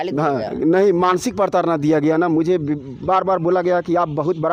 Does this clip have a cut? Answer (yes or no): no